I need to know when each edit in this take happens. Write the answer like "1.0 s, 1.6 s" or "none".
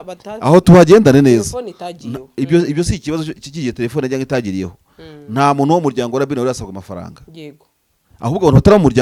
none